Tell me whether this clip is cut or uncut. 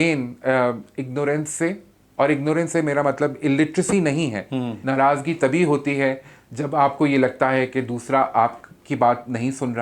cut